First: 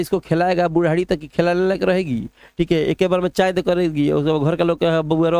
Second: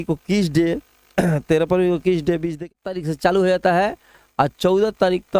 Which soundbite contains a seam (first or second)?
second